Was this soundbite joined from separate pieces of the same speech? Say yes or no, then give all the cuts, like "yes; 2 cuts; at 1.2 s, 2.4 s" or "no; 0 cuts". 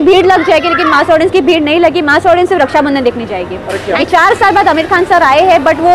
yes; 1 cut; at 4.0 s